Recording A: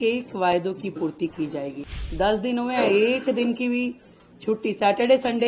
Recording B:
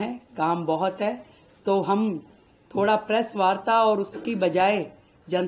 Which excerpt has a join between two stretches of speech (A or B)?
A